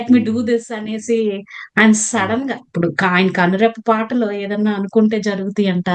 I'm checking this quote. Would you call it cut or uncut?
uncut